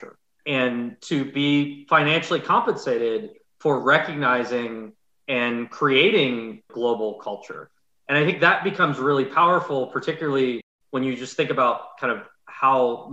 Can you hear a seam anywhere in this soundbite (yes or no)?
yes